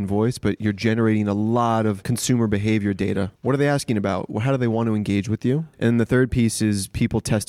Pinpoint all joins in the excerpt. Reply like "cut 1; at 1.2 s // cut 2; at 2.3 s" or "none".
cut 1; at 2.1 s // cut 2; at 3.3 s // cut 3; at 5.7 s